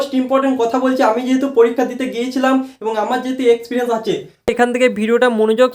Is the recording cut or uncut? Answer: cut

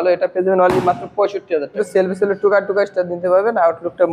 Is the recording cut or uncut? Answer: cut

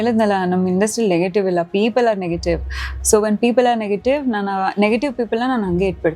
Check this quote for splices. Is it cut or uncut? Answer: uncut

